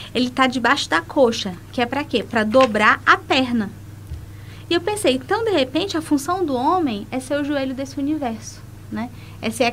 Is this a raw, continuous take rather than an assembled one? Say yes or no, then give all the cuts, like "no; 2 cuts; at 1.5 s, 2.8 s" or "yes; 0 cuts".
yes; 0 cuts